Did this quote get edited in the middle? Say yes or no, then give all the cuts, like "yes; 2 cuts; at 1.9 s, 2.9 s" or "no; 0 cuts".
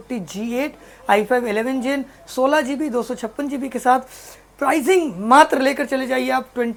no; 0 cuts